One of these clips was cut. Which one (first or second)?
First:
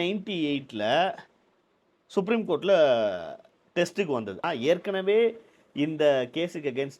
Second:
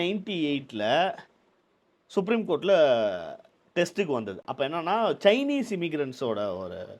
first